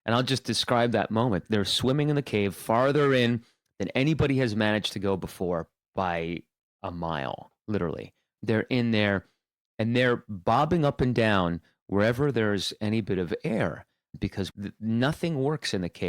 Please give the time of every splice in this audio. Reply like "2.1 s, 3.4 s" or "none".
14.5 s